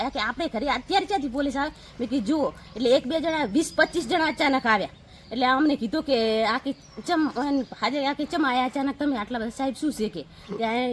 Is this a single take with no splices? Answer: yes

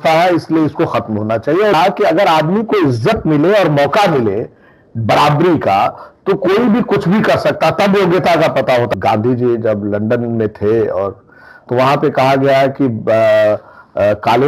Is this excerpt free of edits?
no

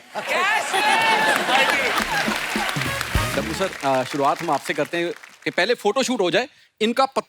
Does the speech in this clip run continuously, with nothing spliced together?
no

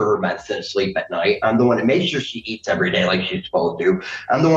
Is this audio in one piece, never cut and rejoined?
yes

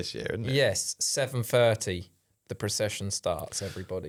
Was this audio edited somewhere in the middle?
no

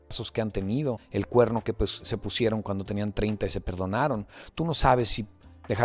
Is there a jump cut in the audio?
yes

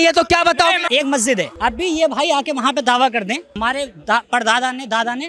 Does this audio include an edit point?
yes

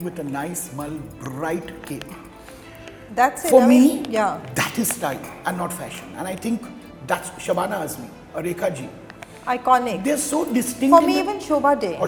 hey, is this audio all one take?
yes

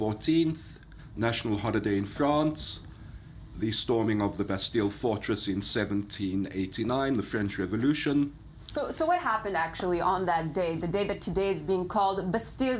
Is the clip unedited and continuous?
no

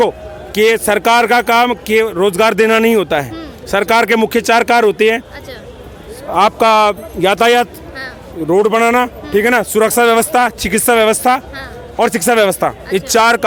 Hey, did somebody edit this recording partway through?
no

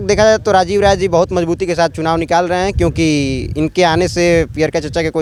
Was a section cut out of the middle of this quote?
no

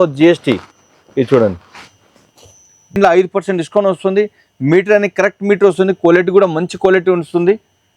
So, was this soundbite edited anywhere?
yes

